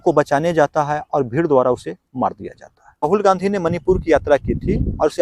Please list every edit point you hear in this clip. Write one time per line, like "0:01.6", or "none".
0:03.1